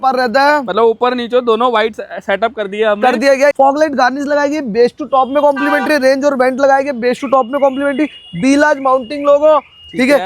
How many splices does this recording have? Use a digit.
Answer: 1